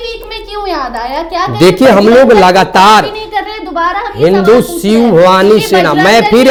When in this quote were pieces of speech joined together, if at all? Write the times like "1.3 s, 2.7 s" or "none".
none

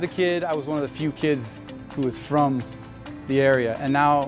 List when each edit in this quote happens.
none

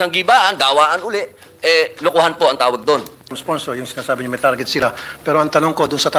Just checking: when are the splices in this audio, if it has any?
3.4 s

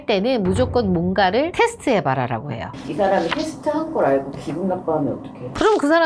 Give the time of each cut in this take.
2.7 s

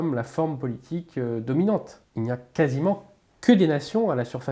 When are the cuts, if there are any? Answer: 2.0 s

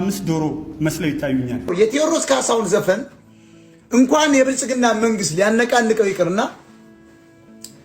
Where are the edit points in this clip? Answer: 1.7 s

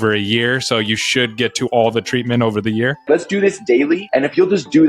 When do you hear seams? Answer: 3.0 s, 4.0 s

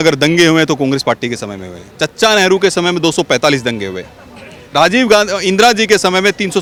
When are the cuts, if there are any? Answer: none

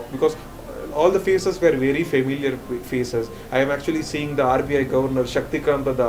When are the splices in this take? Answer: none

